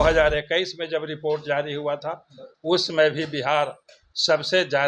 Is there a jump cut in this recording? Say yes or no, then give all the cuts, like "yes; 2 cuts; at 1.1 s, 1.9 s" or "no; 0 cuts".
no; 0 cuts